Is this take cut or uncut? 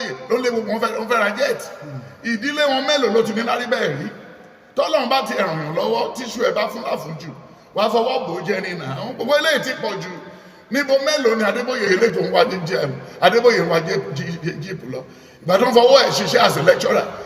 cut